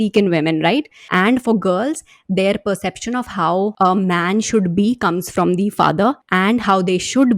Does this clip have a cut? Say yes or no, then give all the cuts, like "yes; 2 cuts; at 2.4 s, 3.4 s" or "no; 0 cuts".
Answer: yes; 3 cuts; at 1.0 s, 3.7 s, 6.2 s